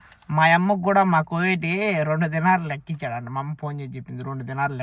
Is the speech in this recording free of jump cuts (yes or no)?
yes